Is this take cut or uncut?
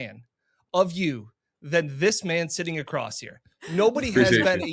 uncut